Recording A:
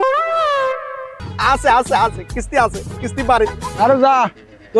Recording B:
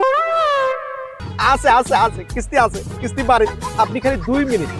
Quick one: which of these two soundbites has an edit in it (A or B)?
A